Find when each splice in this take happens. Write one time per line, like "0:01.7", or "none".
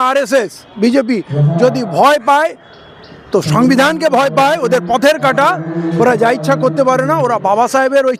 none

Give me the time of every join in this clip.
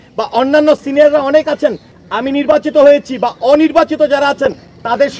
0:01.9

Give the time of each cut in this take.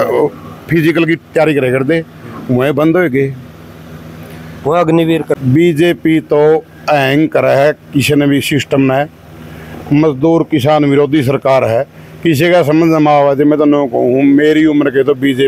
0:05.4

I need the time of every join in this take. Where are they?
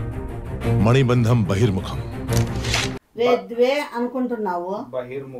0:03.1

